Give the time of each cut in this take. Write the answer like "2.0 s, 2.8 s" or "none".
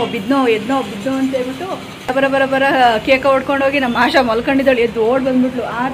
2.1 s